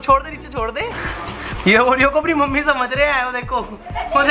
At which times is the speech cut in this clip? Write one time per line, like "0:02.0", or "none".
0:01.0